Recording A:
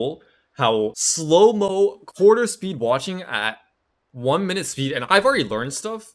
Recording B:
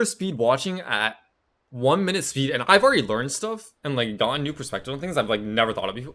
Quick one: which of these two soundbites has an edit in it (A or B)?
A